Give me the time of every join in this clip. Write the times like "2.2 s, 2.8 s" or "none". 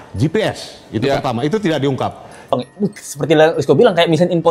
2.5 s

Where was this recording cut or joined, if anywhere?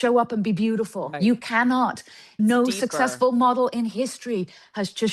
1.1 s, 2.3 s

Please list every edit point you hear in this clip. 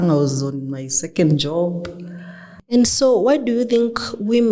2.5 s

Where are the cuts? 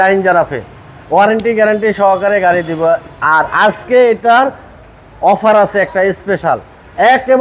none

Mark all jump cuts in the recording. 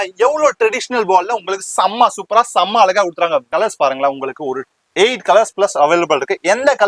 3.5 s

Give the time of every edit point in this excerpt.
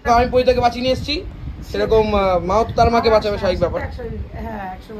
none

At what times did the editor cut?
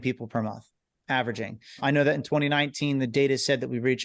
1.8 s

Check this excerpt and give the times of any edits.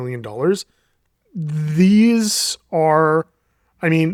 none

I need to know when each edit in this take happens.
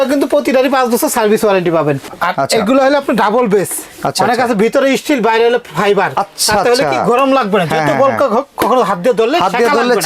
2.1 s

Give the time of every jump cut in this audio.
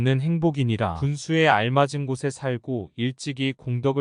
0.9 s

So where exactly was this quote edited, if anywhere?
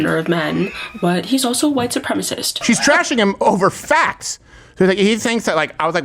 2.6 s

